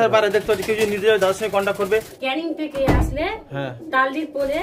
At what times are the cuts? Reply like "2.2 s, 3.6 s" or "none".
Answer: 2.1 s